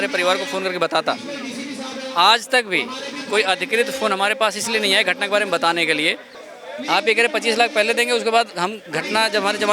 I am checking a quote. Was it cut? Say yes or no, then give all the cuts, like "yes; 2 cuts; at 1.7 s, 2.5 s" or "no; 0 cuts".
yes; 1 cut; at 6.3 s